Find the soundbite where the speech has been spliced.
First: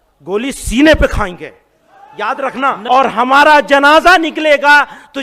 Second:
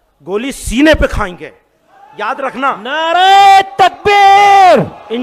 first; 1 cut; at 2.8 s

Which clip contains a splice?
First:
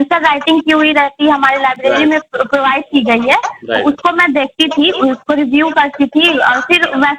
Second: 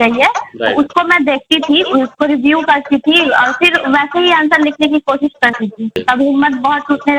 second; 1 cut; at 6.0 s

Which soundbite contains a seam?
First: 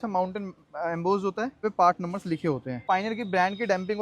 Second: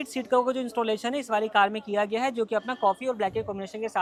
first; 2 cuts; at 1.6 s, 2.8 s

